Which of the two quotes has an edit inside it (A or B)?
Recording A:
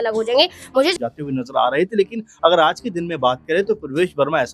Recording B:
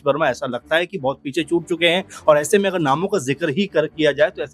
A